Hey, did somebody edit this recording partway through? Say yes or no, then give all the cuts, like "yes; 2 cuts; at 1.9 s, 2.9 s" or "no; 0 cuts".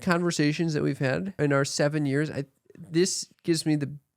yes; 2 cuts; at 1.3 s, 3.3 s